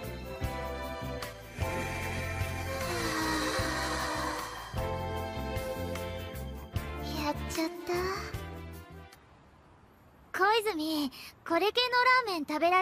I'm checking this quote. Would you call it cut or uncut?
cut